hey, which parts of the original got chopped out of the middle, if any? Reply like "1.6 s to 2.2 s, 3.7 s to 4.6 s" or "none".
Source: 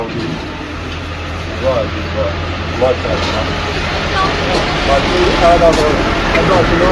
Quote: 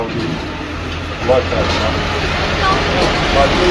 1.1 s to 2.6 s